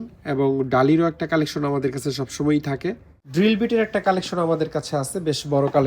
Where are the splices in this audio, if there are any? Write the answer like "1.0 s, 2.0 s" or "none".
3.1 s